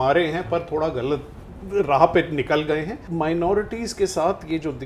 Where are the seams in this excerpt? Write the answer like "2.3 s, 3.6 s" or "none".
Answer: 3.0 s